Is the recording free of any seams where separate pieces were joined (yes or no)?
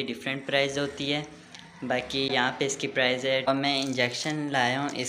no